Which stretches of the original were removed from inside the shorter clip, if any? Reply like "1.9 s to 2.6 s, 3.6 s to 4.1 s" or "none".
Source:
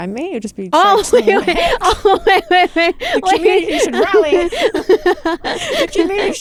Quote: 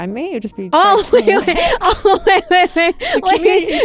none

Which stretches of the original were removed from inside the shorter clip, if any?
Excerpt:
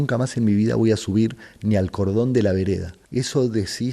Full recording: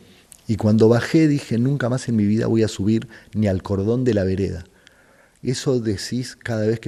4.7 s to 5.3 s

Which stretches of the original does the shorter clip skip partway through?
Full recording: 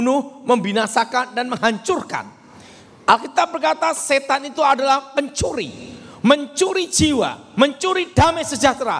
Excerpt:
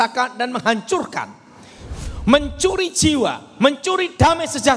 2.8 s to 5.8 s

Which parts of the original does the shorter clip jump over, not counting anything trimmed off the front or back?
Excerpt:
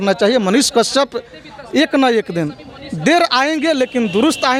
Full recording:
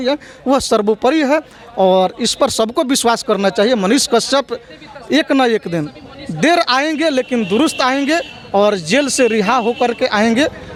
none

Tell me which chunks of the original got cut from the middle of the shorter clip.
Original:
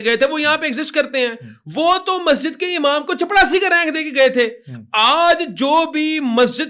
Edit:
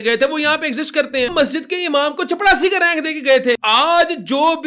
1.3 s to 2.2 s, 4.5 s to 4.9 s

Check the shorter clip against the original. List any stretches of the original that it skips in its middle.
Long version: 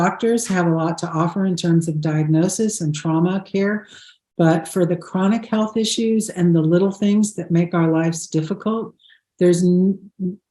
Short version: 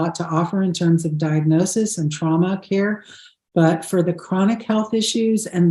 none

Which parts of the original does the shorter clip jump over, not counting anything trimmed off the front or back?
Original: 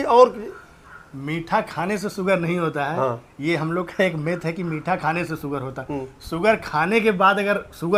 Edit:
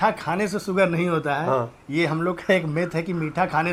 none

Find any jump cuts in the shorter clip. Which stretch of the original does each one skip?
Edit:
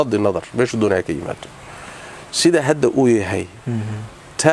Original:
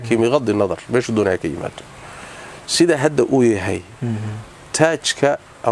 none

